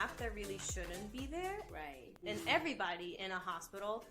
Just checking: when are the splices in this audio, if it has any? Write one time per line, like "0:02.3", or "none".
0:02.1